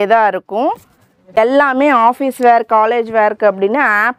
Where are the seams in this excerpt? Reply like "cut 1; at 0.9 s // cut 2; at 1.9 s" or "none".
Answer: cut 1; at 1.4 s